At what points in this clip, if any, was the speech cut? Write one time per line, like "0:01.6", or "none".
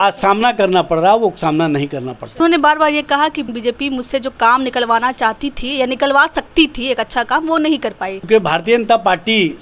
0:02.4
0:03.5
0:08.2